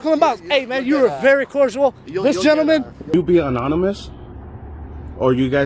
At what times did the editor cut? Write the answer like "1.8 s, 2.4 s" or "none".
3.1 s